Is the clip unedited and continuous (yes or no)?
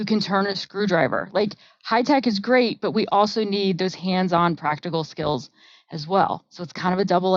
yes